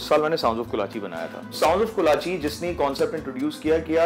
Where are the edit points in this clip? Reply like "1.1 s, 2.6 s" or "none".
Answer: 1.6 s